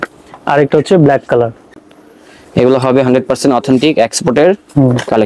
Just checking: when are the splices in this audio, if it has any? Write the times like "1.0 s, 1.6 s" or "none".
1.7 s